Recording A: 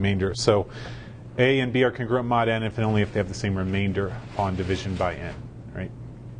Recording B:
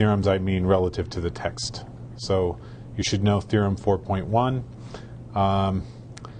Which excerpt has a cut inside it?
B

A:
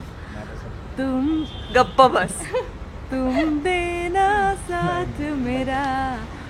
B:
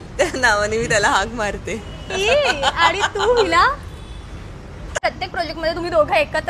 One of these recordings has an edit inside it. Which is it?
B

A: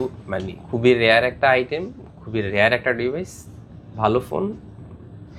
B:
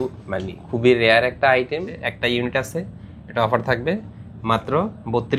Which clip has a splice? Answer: B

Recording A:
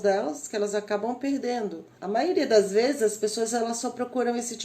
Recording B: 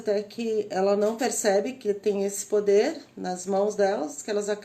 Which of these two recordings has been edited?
A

